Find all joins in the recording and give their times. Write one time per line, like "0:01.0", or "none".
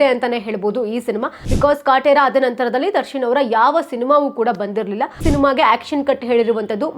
0:01.4
0:05.2